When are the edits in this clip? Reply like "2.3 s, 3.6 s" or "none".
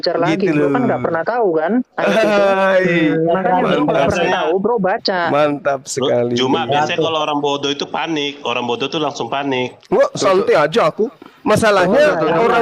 none